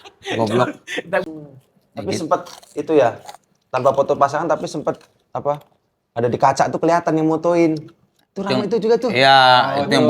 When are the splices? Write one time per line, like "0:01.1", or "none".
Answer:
0:01.2